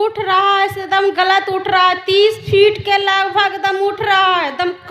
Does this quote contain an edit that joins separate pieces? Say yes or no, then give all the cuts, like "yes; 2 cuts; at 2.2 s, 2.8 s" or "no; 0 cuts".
no; 0 cuts